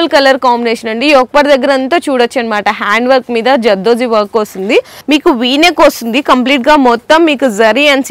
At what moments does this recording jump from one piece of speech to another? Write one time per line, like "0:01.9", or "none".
0:04.9